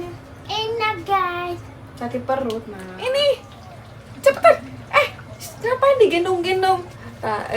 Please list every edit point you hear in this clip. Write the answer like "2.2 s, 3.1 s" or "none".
2.8 s